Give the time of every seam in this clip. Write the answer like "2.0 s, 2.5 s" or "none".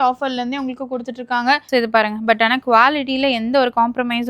1.7 s